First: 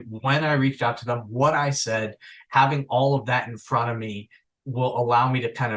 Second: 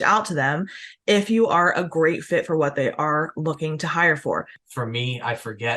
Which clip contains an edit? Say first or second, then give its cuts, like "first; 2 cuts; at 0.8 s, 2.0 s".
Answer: second; 1 cut; at 4.6 s